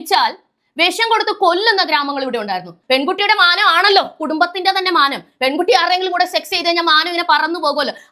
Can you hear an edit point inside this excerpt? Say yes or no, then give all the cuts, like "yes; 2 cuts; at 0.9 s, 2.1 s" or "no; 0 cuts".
yes; 1 cut; at 2.7 s